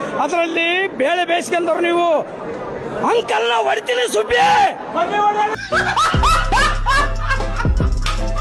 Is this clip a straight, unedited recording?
yes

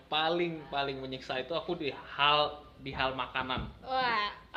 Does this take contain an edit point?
no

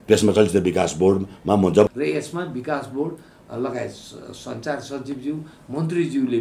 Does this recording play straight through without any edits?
no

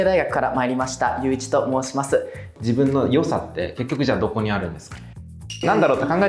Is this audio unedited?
no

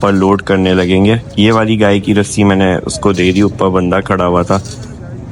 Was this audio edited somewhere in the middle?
no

